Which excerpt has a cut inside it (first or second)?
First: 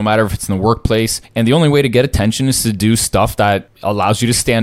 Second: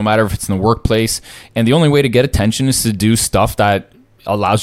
first